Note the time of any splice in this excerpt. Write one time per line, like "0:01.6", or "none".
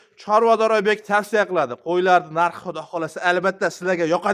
none